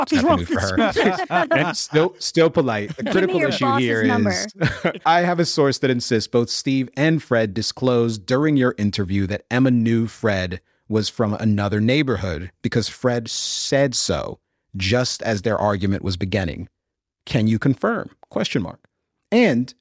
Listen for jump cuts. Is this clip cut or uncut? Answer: cut